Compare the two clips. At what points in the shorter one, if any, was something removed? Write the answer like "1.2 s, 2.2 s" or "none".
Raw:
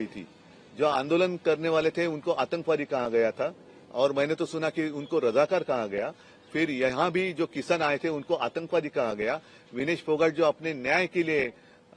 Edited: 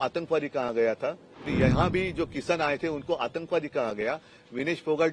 1.5 s